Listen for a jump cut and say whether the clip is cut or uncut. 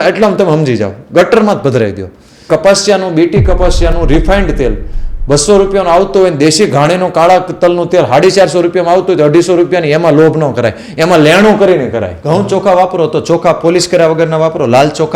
cut